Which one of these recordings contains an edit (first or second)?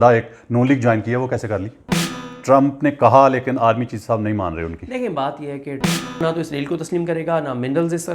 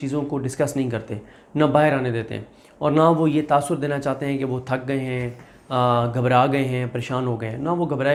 first